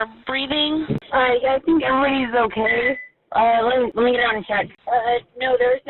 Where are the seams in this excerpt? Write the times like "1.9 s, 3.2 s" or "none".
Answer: 1.0 s, 3.9 s, 4.8 s

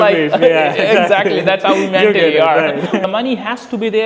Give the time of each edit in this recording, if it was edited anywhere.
3.1 s

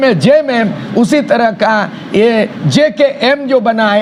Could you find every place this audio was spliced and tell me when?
none

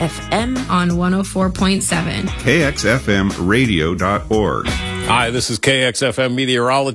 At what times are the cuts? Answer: 4.8 s

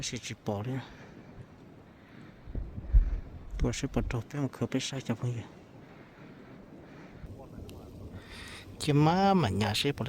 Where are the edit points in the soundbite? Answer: 7.3 s

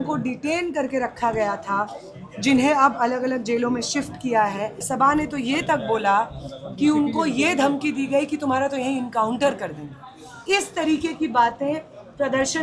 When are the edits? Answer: 4.8 s

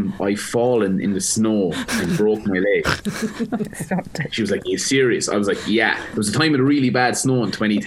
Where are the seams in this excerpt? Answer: none

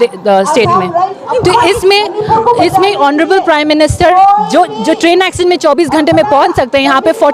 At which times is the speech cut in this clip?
1.1 s

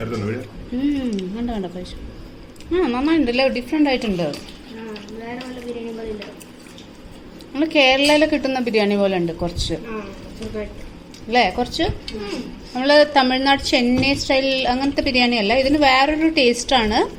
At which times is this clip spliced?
none

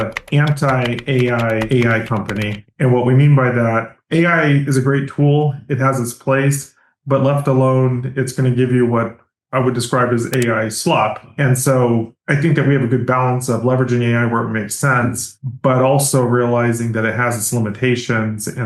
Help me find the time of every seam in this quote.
4.0 s, 11.2 s

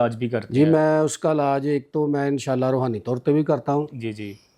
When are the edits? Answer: none

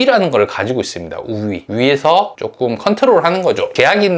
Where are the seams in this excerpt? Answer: none

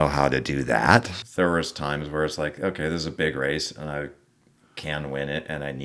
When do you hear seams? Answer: 1.2 s

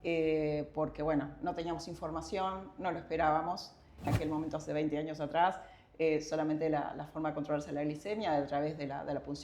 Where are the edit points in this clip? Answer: 4.1 s

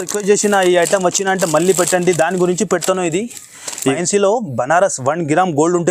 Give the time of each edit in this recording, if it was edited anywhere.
4.0 s

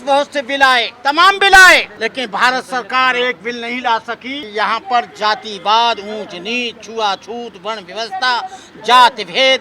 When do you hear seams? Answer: 0.9 s, 1.9 s, 4.4 s

